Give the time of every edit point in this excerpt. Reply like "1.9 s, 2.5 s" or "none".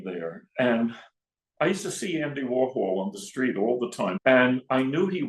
4.2 s